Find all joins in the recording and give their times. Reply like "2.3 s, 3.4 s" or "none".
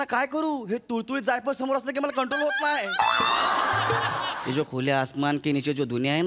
4.4 s

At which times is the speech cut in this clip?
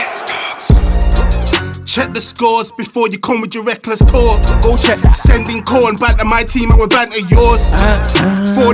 none

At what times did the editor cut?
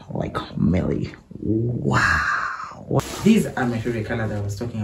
3.0 s

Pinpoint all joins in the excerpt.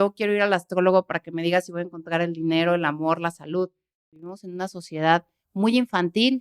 4.5 s

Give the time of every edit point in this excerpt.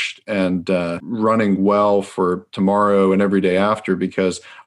1.0 s

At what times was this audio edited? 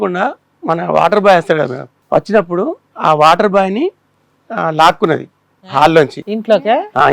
1.9 s

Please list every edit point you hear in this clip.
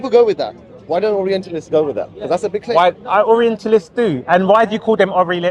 none

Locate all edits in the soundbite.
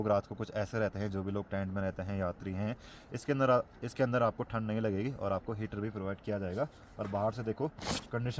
none

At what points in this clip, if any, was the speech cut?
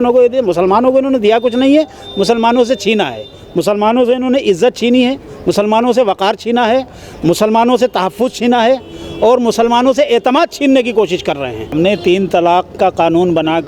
11.7 s

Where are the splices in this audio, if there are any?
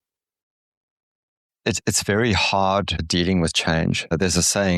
3.1 s, 4.1 s

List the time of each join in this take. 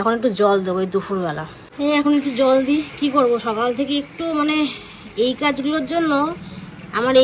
none

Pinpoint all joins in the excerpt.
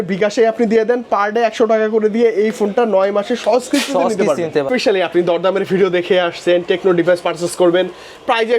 4.7 s

